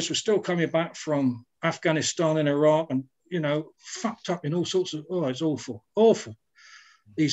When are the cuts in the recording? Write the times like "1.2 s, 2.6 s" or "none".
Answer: none